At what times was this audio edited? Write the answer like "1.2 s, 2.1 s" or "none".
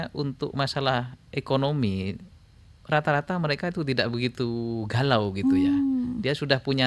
none